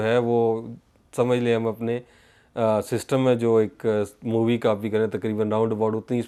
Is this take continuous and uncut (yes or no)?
yes